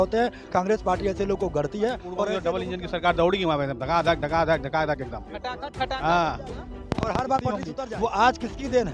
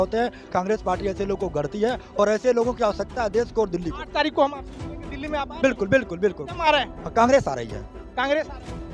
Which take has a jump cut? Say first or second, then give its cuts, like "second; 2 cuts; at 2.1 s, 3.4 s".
first; 2 cuts; at 2.4 s, 7.7 s